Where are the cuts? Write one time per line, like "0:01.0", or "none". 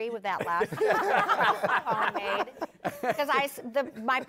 none